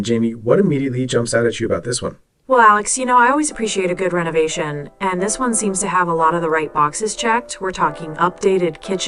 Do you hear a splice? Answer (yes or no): no